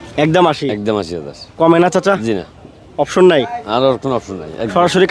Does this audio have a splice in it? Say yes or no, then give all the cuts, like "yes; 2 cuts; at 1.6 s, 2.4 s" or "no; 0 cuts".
no; 0 cuts